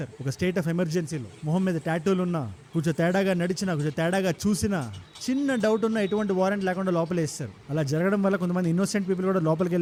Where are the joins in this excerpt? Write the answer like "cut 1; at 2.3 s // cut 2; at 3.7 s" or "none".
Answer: none